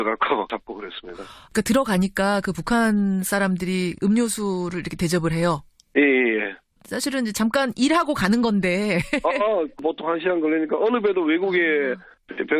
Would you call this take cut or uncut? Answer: cut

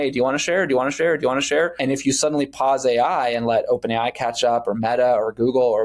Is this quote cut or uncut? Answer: cut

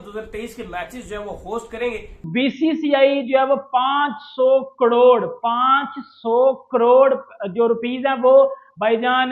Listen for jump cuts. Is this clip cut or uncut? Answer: cut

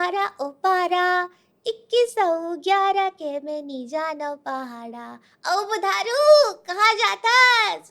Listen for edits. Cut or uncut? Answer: uncut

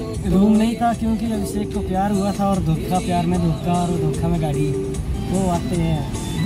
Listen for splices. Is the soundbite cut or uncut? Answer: uncut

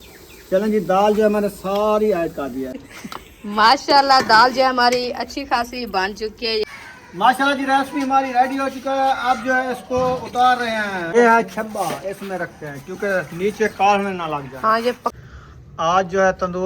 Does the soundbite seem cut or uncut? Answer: cut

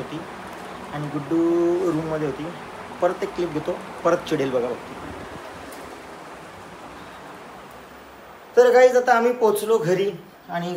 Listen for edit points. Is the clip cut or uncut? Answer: uncut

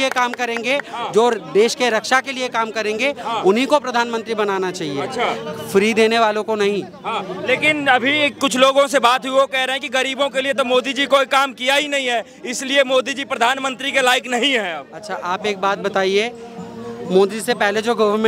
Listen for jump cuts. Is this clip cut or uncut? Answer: uncut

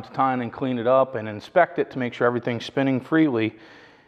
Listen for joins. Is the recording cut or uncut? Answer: uncut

